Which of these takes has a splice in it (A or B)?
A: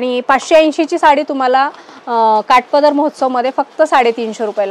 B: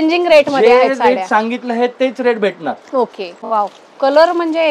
B